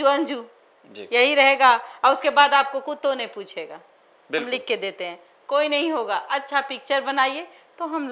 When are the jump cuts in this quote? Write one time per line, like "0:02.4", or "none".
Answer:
none